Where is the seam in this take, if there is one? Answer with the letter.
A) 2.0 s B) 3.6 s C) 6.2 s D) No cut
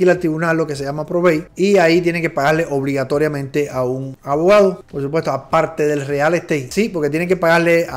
D